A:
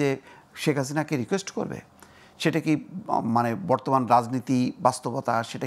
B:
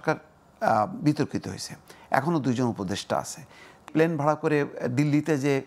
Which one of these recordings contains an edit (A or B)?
B